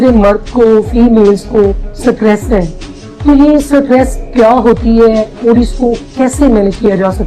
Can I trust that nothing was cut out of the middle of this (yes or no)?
yes